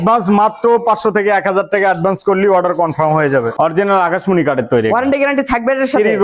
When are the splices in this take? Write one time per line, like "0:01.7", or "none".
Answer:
0:03.5